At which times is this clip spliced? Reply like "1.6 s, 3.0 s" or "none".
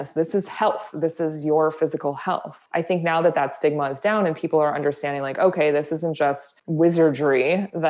2.5 s, 6.6 s